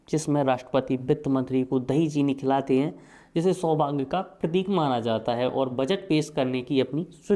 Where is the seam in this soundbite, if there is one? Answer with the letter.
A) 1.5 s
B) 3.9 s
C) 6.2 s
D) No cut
D